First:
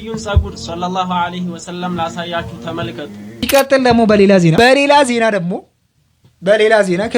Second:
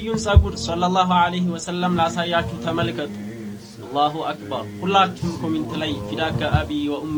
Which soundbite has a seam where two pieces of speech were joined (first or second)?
first